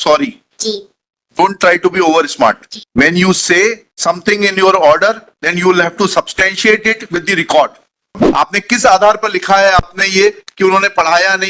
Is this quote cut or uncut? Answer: cut